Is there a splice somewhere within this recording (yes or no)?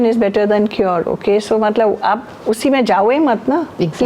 no